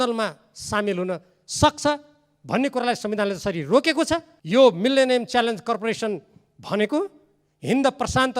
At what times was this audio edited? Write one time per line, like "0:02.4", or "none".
0:04.3